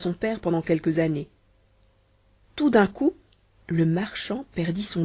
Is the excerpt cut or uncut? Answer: uncut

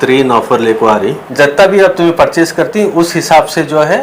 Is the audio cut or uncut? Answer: cut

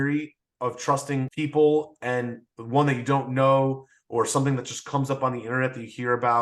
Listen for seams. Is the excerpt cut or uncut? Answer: cut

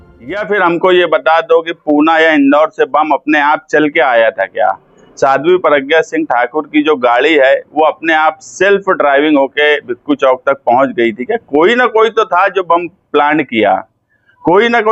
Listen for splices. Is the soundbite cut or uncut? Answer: uncut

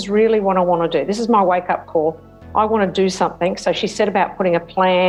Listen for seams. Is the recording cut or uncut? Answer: uncut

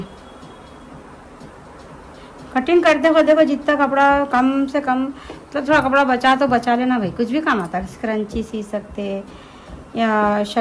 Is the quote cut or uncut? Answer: uncut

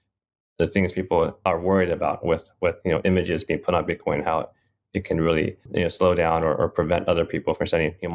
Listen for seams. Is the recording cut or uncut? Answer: cut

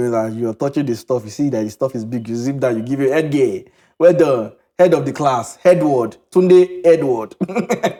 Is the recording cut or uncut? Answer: uncut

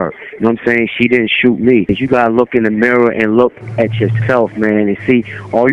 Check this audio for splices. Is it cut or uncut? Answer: cut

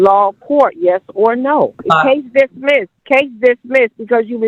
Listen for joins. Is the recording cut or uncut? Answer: cut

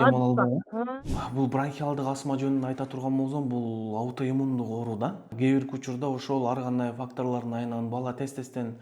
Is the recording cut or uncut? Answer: cut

